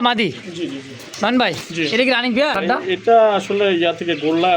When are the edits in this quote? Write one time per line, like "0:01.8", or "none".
0:02.6